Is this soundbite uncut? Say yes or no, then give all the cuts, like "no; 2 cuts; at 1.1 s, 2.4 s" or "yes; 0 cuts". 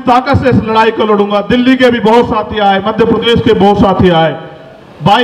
yes; 0 cuts